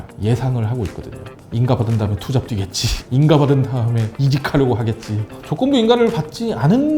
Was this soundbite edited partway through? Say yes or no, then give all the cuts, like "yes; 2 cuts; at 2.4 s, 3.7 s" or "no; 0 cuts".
yes; 2 cuts; at 4.0 s, 5.2 s